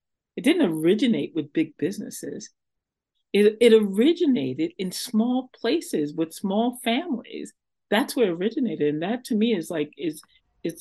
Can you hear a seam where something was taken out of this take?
no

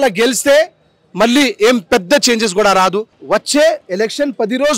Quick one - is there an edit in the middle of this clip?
yes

